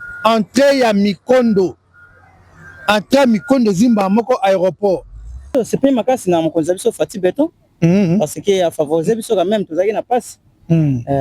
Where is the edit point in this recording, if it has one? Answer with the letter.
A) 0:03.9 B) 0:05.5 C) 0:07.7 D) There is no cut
B